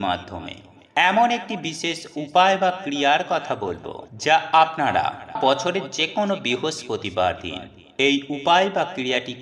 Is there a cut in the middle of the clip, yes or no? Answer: yes